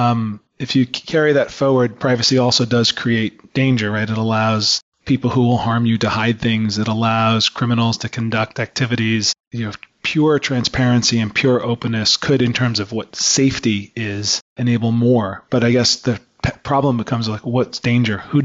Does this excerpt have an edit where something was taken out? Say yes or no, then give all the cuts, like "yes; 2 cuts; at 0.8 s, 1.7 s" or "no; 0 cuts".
yes; 1 cut; at 9.5 s